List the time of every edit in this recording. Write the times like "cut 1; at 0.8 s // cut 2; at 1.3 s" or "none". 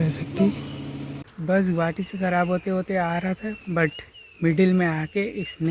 cut 1; at 1.1 s